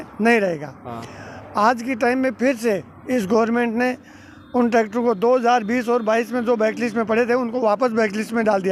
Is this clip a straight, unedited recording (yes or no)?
yes